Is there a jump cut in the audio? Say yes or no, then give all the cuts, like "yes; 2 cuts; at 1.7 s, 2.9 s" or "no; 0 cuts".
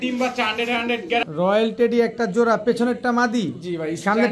yes; 1 cut; at 1.3 s